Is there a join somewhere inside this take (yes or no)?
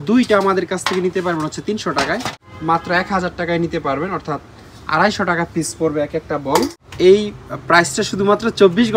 yes